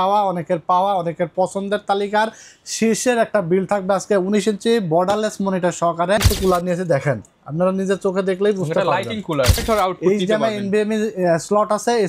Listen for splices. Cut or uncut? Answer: cut